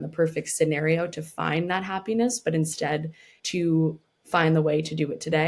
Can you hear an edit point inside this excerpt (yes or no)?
no